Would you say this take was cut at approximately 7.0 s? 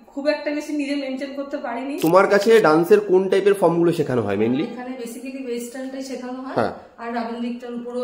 no; 1 cut; at 1.9 s

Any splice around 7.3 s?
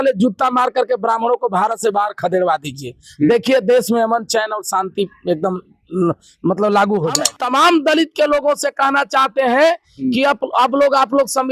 yes; 1 cut; at 7.3 s

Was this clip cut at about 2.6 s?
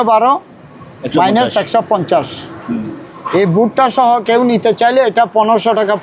no; 0 cuts

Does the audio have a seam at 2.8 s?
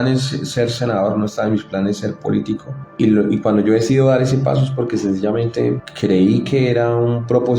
yes; 2 cuts; at 2.8 s, 5.9 s

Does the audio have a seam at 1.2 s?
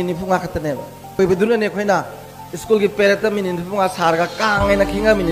yes; 1 cut; at 1.2 s

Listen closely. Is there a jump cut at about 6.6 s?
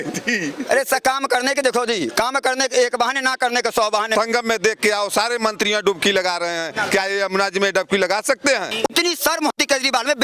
no; 2 cuts; at 4.1 s, 8.7 s

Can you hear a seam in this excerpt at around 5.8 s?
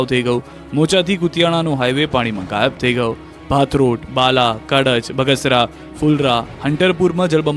yes; 1 cut; at 5.8 s

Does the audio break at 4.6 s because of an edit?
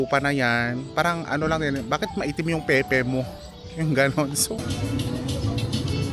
yes; 1 cut; at 4.6 s

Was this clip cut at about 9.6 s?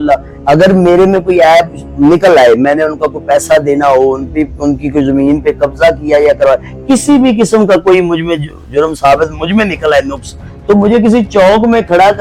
no; 0 cuts

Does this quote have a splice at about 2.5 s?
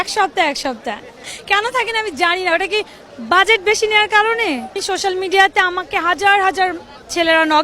no; 2 cuts; at 1.1 s, 4.8 s

